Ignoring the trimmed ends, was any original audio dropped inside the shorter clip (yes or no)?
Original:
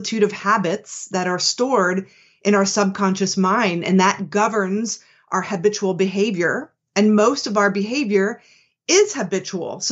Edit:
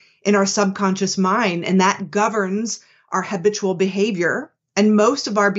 no